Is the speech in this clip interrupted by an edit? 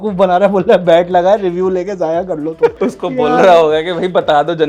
yes; 1 cut; at 2.7 s

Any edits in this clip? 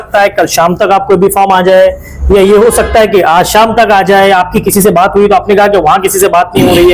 no; 0 cuts

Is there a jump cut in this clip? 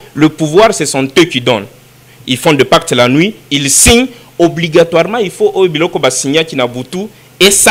no; 0 cuts

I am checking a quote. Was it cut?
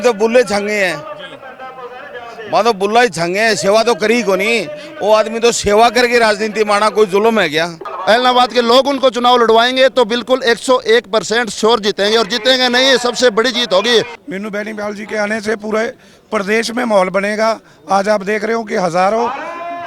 yes; 2 cuts; at 7.9 s, 14.2 s

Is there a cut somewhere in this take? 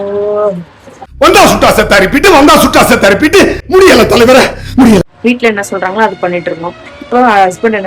yes; 1 cut; at 5.1 s

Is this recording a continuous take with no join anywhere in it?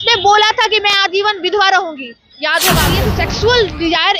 no; 1 cut; at 3.1 s

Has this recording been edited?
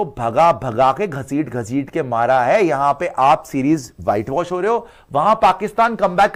no; 0 cuts

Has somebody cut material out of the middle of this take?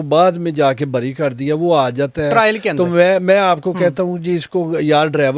no; 0 cuts

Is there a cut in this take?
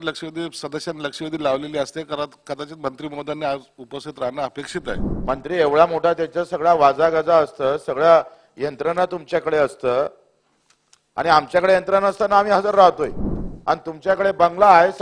yes; 1 cut; at 5.1 s

